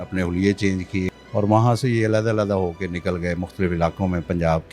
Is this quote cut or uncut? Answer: cut